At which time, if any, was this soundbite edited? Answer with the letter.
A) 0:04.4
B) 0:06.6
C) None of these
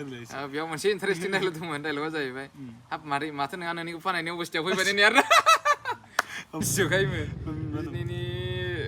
B